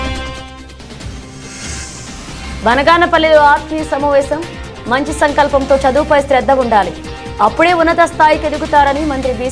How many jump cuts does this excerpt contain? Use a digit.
1